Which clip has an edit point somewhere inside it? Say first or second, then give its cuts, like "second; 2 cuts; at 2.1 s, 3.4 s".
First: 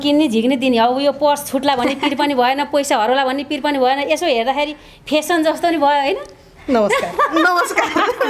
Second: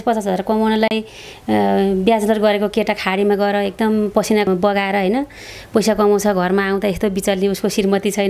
second; 1 cut; at 4.5 s